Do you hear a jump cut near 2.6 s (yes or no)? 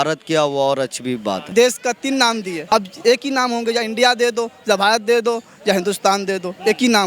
yes